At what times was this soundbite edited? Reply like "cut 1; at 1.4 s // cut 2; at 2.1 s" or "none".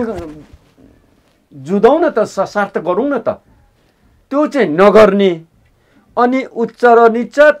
none